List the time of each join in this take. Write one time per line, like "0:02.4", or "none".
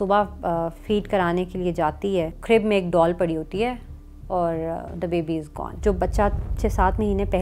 0:02.4
0:05.7